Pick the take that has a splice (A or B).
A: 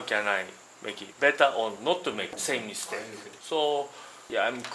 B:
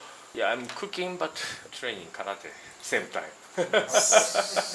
A